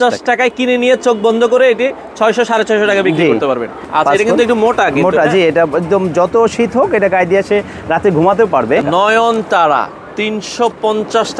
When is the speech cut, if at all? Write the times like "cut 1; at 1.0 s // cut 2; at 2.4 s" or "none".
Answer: cut 1; at 3.8 s // cut 2; at 8.8 s

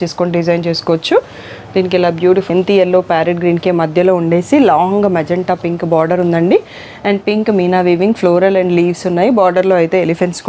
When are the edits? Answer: cut 1; at 2.5 s

